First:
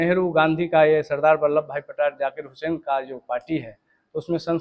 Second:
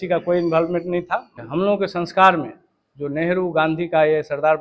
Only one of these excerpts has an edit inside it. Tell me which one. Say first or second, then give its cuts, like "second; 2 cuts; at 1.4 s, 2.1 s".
second; 1 cut; at 1.3 s